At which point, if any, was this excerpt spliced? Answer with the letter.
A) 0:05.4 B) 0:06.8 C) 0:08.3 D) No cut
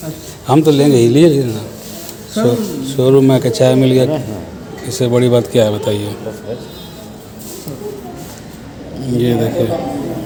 D